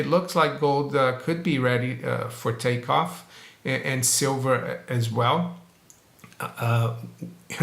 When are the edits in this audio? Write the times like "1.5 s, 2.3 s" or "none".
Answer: none